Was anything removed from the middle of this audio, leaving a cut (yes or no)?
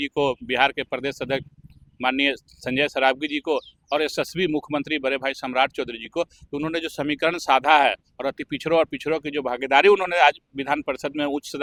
no